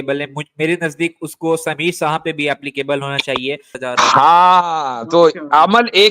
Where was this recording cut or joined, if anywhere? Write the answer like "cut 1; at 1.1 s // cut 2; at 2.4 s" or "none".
cut 1; at 3.7 s